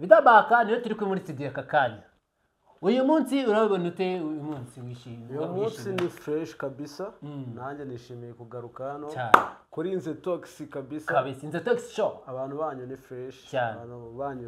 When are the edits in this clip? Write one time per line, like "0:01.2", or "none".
none